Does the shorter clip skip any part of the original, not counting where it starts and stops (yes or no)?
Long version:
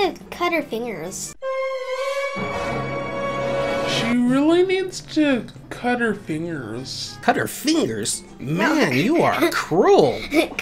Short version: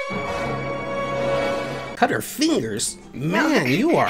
yes